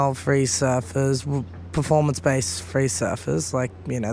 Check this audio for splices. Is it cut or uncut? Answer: uncut